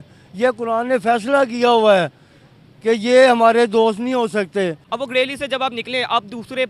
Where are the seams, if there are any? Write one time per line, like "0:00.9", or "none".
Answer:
0:04.8